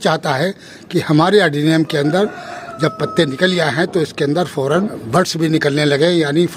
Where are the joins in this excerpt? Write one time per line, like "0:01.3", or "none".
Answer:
0:05.0